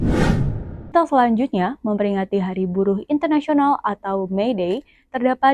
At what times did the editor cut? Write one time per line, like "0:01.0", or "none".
0:00.9